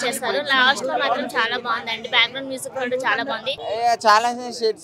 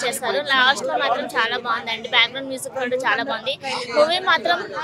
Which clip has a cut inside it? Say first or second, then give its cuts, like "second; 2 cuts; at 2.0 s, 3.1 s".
first; 1 cut; at 3.6 s